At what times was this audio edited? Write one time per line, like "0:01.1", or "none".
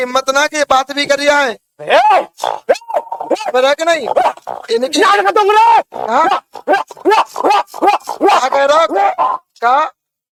none